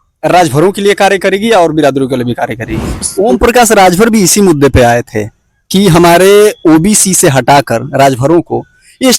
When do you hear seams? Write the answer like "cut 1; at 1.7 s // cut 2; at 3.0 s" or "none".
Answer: cut 1; at 3.1 s